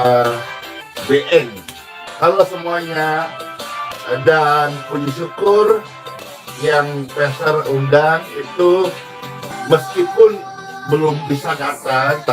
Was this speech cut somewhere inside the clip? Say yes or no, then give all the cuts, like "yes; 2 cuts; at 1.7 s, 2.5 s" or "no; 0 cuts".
no; 0 cuts